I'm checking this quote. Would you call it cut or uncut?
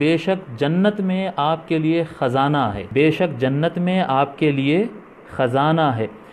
cut